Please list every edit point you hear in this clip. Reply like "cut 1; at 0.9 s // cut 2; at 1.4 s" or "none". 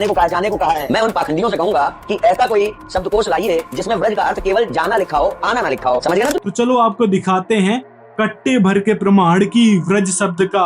none